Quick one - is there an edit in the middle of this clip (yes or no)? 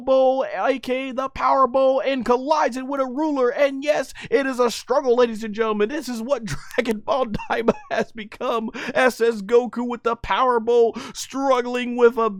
no